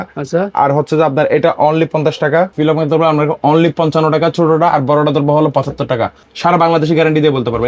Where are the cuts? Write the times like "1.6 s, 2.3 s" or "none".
2.5 s, 6.2 s